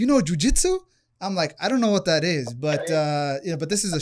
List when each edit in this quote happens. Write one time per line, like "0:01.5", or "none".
none